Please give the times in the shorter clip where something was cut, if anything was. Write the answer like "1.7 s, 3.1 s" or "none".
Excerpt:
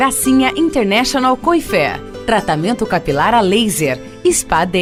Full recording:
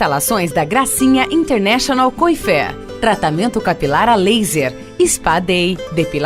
none